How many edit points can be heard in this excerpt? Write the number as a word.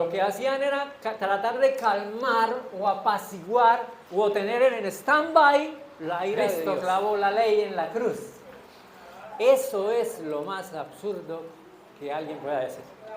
one